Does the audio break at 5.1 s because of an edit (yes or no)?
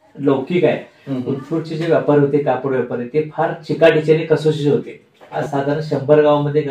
yes